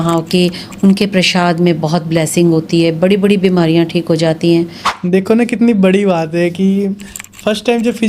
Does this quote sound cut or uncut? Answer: cut